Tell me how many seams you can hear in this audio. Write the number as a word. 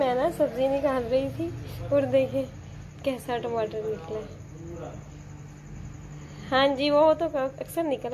zero